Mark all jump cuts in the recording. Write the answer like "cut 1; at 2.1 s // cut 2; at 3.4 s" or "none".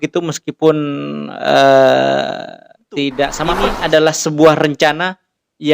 cut 1; at 3.7 s